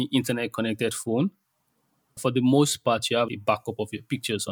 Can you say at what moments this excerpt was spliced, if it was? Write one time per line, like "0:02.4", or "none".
0:02.2
0:03.3